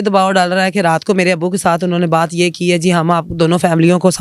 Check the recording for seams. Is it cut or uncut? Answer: uncut